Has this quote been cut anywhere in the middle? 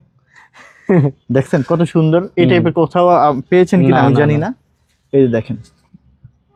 no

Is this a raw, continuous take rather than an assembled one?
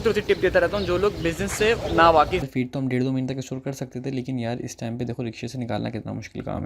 no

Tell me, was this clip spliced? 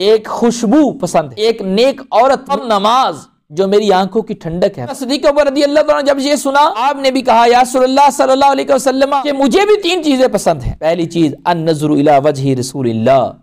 yes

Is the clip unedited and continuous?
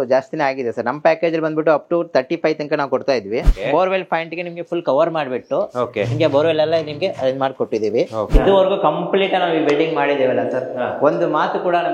no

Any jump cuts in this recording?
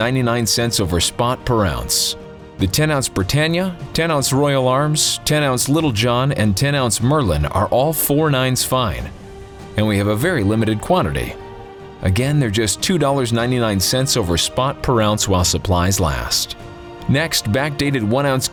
no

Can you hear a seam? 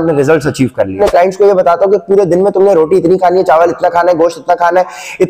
yes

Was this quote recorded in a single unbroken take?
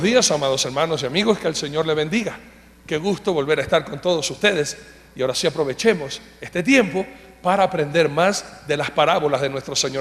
yes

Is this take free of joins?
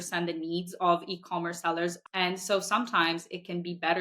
no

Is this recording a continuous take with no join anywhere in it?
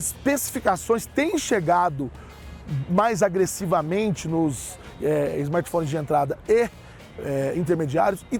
yes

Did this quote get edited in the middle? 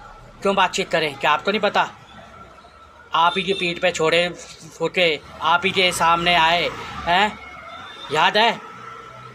no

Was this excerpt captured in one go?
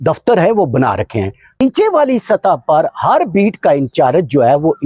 no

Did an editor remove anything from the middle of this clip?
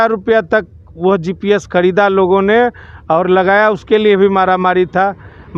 no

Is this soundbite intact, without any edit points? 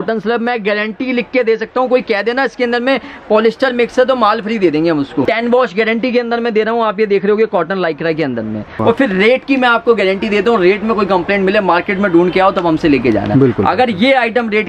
no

